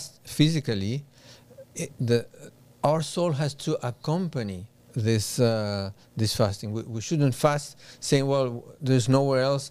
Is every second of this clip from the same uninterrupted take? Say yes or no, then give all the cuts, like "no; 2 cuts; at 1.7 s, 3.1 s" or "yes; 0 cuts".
yes; 0 cuts